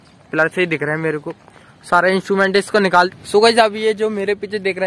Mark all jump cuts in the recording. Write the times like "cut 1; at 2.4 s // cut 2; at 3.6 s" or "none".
cut 1; at 2.9 s